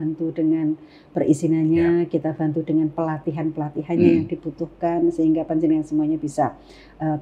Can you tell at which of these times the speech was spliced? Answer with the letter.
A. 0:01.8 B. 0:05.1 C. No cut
C